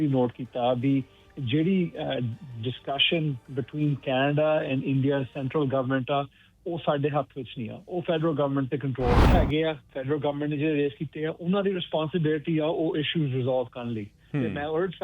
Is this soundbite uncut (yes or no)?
no